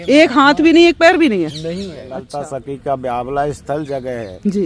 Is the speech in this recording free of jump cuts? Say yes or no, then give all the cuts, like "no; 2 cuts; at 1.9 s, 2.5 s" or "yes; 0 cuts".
no; 1 cut; at 2.2 s